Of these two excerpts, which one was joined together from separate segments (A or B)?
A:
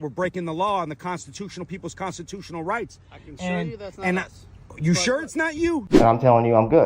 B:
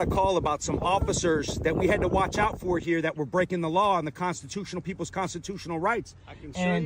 A